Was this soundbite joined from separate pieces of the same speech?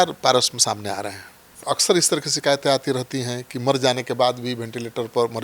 yes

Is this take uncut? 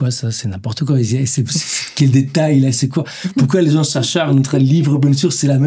yes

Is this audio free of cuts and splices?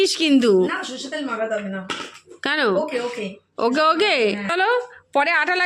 no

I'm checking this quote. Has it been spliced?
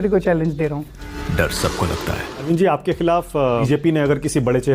yes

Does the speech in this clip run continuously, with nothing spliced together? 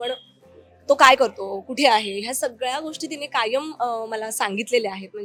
yes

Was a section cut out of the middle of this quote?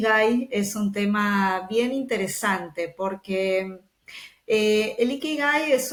no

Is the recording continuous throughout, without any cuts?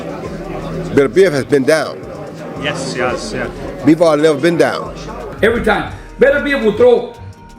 no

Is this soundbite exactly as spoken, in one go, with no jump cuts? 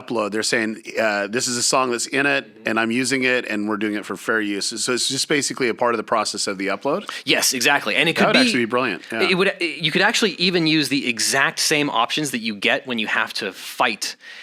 yes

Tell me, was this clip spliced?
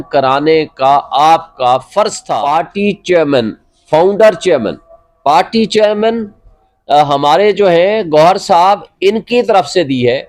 yes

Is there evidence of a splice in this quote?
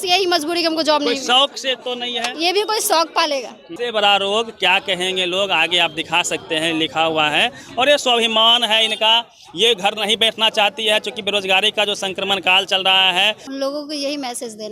yes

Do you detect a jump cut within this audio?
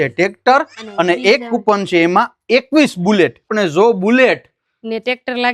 yes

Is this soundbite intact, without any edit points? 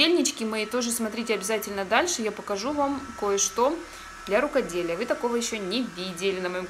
yes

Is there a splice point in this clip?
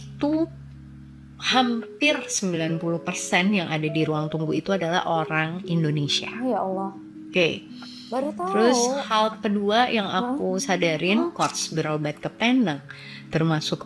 yes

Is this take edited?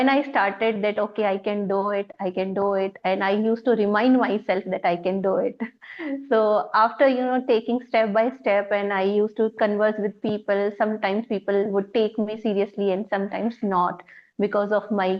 no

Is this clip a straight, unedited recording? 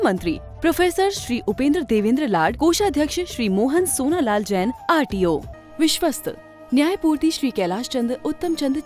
no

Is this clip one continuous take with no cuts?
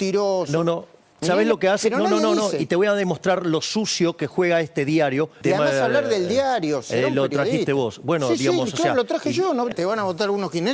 no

